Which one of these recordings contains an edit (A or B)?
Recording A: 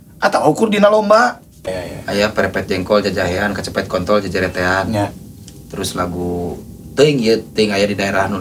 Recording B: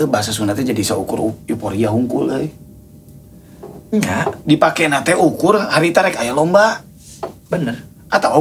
A